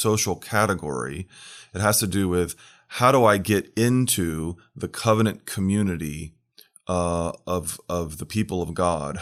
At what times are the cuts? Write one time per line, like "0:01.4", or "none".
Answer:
none